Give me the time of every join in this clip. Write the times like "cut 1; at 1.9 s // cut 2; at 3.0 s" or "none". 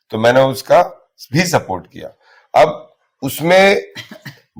none